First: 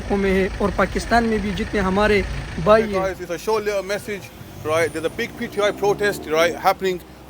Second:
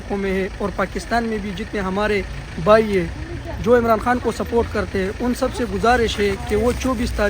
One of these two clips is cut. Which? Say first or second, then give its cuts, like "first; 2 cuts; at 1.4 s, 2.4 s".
first; 1 cut; at 2.9 s